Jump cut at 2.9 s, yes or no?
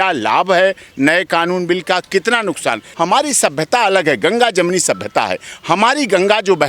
yes